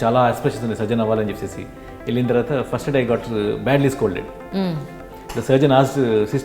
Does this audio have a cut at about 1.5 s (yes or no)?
no